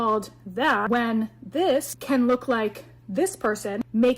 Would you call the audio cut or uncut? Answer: cut